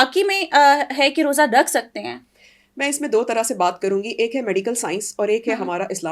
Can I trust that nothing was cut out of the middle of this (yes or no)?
yes